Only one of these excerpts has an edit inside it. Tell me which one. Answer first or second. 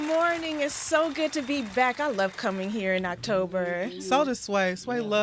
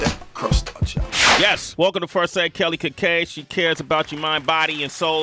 first